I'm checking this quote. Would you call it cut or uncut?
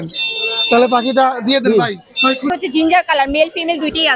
cut